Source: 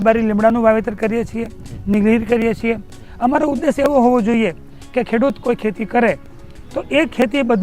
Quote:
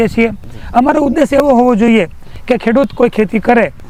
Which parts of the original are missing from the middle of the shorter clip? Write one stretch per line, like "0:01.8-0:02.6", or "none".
none